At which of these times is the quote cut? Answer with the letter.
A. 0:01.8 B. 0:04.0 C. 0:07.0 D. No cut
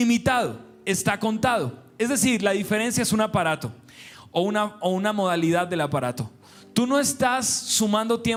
D